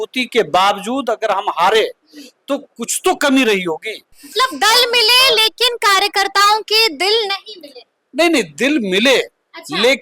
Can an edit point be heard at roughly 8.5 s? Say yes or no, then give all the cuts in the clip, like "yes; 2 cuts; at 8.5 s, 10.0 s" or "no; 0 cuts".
no; 1 cut; at 4.3 s